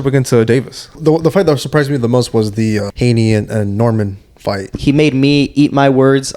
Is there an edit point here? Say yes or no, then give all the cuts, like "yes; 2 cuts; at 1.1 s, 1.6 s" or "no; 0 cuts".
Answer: yes; 3 cuts; at 1.0 s, 2.9 s, 4.8 s